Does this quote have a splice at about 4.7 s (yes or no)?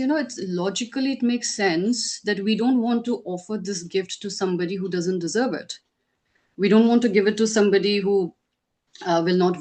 no